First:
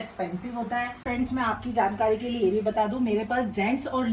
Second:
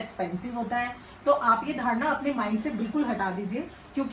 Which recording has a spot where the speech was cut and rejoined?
first; 1 cut; at 1.1 s

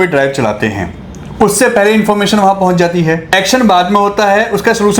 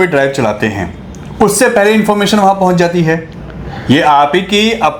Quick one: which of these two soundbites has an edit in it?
first; 1 cut; at 3.3 s

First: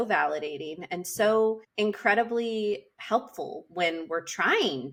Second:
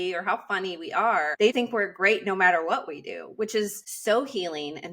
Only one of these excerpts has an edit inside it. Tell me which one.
second; 2 cuts; at 1.5 s, 3.9 s

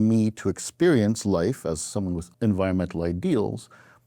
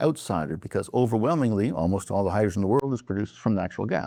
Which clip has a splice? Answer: first; 1 cut; at 2.3 s

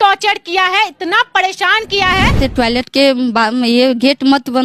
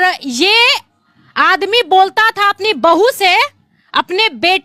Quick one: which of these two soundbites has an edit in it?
first; 1 cut; at 2.4 s

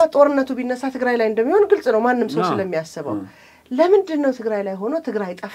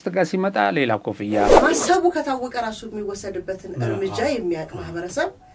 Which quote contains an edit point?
second; 1 cut; at 1.5 s

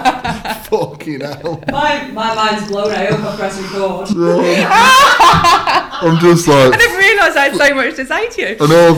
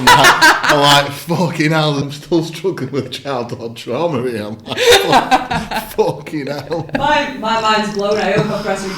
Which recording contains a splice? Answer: second; 1 cut; at 2.1 s

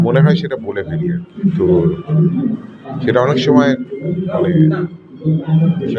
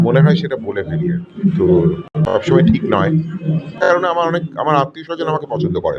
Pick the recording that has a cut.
second; 2 cuts; at 2.1 s, 3.7 s

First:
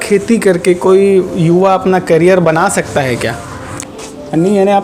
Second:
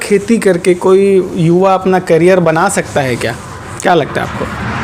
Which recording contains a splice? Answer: first; 1 cut; at 3.8 s

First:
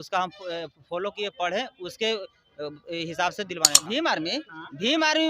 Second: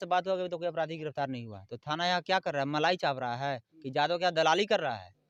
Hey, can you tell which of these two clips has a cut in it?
first; 1 cut; at 3.7 s

